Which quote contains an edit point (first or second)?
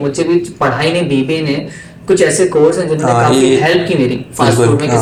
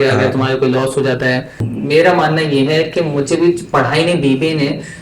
second